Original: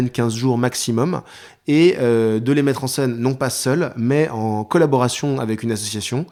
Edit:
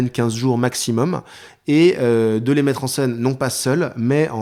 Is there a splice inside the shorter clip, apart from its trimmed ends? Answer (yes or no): no